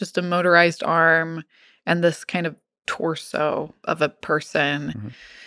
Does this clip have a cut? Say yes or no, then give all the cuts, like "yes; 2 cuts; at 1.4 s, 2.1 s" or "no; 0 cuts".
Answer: yes; 1 cut; at 3.7 s